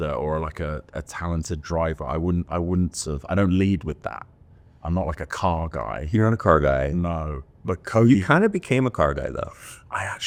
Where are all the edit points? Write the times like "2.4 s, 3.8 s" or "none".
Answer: none